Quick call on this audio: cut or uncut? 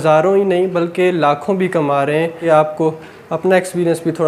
cut